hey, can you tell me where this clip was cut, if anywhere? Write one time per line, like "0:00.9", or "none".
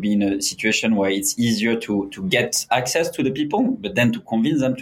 none